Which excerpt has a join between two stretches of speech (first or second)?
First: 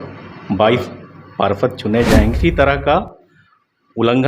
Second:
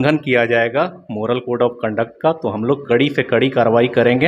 first